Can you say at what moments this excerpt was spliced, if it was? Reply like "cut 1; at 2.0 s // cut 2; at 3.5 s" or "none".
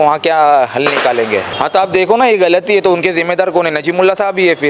cut 1; at 1.5 s